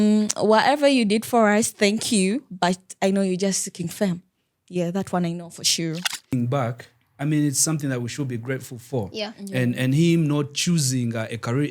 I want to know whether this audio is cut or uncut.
cut